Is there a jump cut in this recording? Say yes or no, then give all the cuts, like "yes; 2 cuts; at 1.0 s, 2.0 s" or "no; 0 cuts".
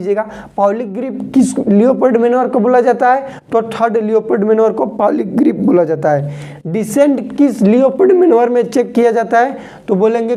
no; 0 cuts